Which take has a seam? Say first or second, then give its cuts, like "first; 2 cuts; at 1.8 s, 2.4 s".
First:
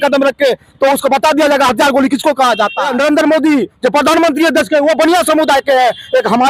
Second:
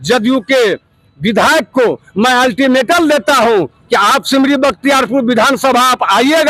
first; 1 cut; at 2.8 s